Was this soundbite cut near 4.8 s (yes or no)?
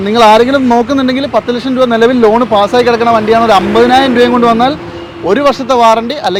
no